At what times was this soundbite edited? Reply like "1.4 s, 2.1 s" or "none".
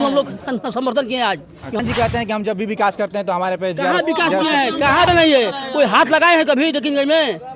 1.8 s, 5.1 s